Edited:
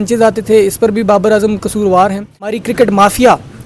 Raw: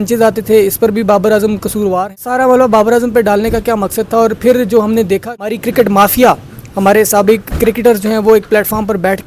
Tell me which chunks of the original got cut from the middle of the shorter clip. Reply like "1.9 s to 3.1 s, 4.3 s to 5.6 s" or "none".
2.3 s to 5.3 s